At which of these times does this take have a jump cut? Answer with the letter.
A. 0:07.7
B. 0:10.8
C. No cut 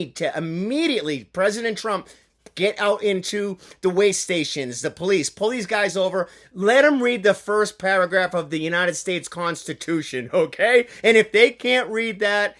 C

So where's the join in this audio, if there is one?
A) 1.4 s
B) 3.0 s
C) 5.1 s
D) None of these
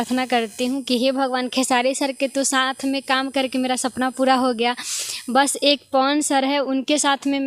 D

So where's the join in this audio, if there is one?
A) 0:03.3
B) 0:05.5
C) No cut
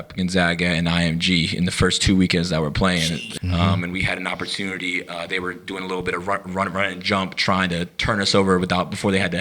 A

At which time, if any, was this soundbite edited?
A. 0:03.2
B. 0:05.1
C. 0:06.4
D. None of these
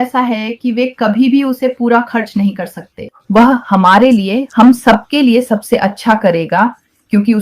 A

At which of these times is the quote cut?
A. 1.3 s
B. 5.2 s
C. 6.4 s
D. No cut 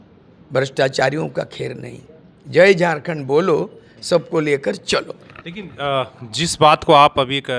D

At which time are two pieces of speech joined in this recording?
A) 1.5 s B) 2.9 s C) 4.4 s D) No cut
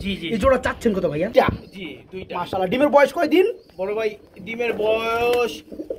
A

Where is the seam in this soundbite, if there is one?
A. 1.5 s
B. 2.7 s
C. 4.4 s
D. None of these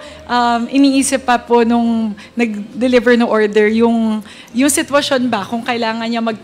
D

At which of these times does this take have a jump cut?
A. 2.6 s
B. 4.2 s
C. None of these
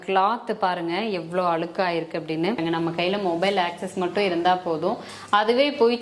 A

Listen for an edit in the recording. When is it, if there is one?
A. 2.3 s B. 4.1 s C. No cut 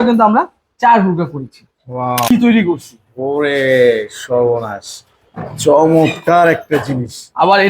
A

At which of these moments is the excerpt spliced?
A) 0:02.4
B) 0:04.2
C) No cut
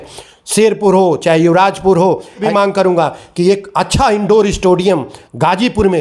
A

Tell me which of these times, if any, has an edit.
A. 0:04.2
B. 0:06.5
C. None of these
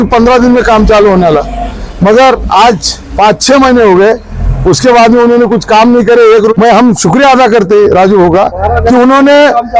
B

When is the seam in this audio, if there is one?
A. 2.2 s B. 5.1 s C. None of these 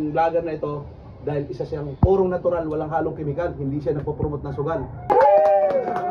B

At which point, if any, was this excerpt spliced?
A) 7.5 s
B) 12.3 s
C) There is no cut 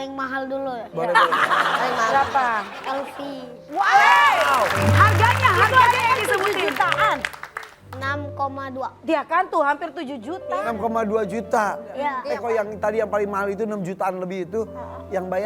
B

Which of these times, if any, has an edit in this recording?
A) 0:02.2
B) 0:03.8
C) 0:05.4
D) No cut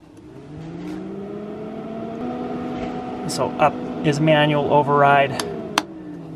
A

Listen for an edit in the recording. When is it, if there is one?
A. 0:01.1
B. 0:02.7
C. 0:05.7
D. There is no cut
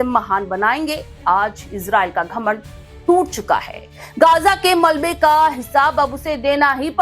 A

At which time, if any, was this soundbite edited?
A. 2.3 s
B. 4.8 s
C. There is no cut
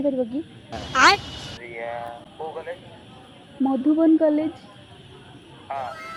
C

